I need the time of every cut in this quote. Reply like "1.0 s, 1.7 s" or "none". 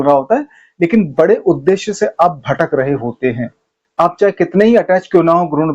3.7 s